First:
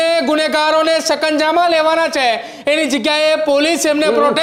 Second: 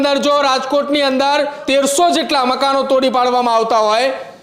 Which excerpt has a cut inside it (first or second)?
second